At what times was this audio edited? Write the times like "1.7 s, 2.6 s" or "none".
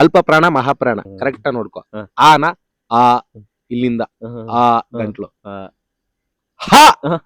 1.1 s